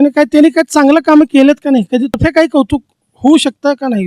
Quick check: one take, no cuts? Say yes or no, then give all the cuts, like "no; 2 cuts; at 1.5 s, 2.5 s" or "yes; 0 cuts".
no; 1 cut; at 2.1 s